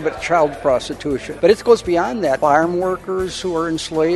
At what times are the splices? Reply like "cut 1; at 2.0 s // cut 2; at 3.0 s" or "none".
cut 1; at 1.3 s // cut 2; at 2.4 s